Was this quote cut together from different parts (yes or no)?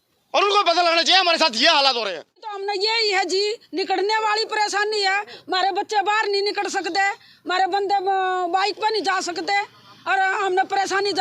yes